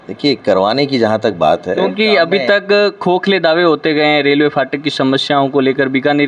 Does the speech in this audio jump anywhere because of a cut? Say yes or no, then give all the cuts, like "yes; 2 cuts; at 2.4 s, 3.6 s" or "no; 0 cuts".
no; 0 cuts